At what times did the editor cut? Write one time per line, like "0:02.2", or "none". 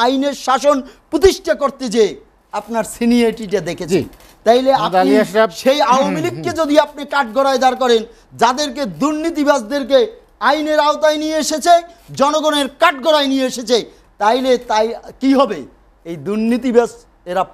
none